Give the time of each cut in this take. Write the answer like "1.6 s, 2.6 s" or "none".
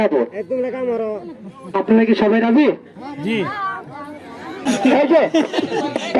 4.7 s